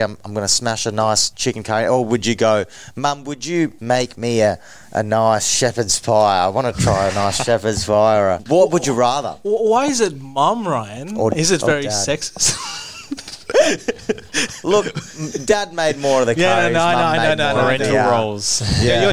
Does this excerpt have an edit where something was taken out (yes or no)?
yes